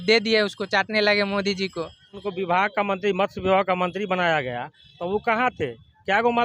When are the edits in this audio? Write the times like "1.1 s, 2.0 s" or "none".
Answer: 2.2 s